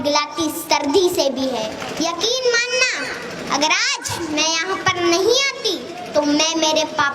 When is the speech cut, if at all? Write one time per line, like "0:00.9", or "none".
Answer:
0:01.8